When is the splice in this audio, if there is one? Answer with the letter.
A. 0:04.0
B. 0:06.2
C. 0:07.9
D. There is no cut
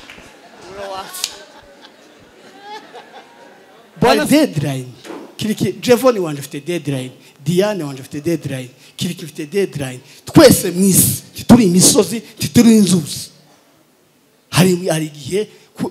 A